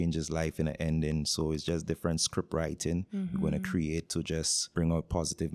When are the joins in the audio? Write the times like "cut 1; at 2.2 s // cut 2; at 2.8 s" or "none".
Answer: cut 1; at 4.6 s